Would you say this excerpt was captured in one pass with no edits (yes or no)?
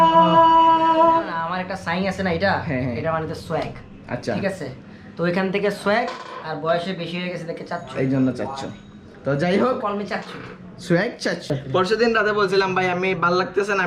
no